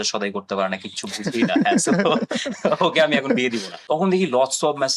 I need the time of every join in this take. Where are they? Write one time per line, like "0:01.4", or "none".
0:03.7